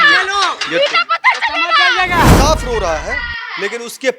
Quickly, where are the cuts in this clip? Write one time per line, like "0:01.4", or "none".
0:02.3

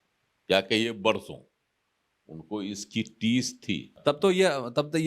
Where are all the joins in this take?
0:03.9

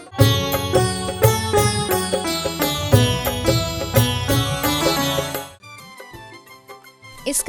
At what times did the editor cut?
0:05.5

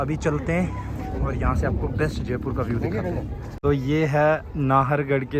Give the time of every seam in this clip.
0:03.5

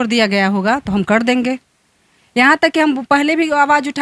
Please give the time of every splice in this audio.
none

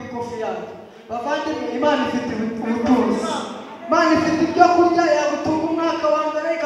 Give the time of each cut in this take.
none

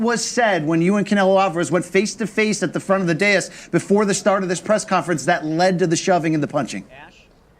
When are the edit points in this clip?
0:03.6

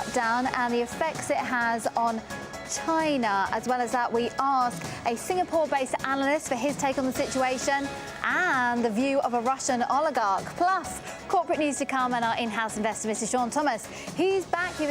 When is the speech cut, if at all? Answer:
0:11.4

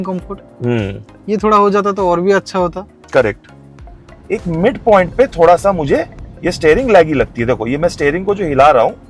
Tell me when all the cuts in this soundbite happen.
0:03.8

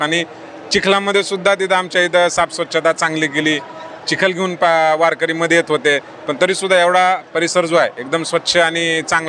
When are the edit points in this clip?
none

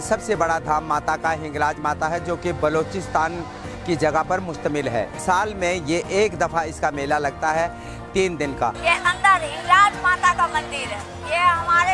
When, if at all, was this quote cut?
0:08.7

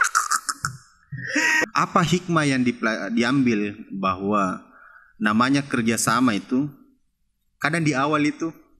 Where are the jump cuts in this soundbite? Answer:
0:01.6

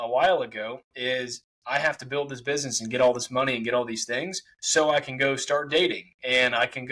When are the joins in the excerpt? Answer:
none

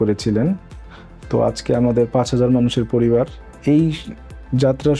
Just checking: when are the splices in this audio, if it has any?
none

